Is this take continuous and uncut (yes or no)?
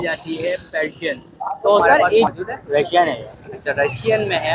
no